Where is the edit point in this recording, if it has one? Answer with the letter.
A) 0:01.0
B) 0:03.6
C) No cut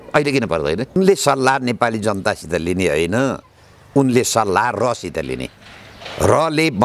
A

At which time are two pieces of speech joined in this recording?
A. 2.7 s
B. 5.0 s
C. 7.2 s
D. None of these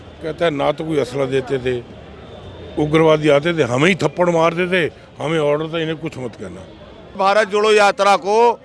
C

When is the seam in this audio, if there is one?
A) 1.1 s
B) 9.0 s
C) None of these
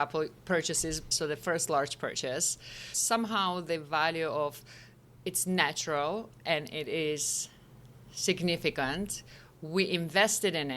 A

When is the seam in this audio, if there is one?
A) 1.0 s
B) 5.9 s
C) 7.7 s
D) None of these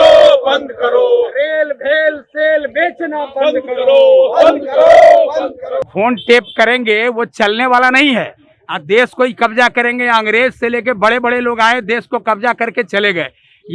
B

